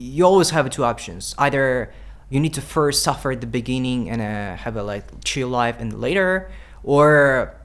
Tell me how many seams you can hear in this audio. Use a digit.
0